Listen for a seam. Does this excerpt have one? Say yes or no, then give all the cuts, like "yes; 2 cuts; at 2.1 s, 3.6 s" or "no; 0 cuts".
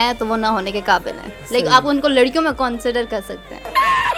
no; 0 cuts